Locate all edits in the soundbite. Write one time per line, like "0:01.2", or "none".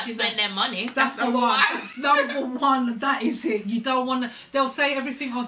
none

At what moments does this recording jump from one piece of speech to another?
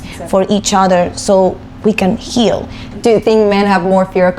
0:02.8

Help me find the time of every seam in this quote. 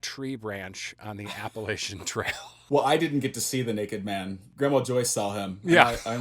0:04.4

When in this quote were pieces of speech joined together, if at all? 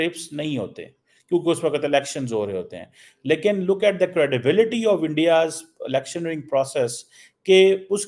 none

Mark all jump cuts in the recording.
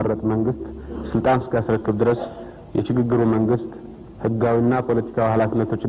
none

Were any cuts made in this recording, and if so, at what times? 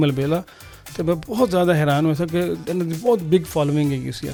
none

